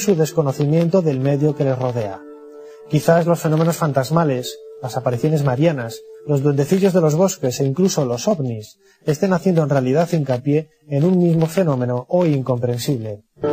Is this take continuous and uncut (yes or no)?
no